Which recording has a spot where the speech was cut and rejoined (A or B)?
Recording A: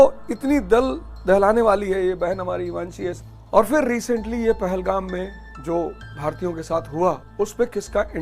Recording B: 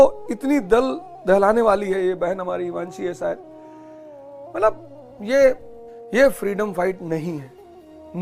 A